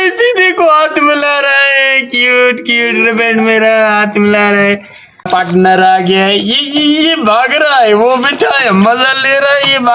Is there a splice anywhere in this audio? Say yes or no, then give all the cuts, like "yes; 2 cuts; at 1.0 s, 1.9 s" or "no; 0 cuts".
yes; 1 cut; at 5.3 s